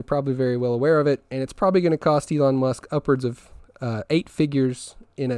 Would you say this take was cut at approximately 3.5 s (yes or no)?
no